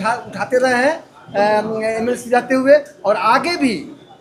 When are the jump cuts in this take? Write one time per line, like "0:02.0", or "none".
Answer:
none